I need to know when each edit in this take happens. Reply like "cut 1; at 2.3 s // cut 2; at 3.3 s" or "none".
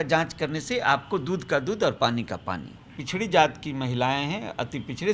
cut 1; at 3.0 s